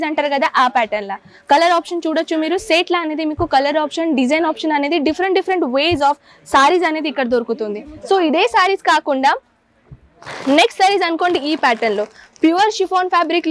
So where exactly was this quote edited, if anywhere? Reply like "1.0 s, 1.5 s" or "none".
none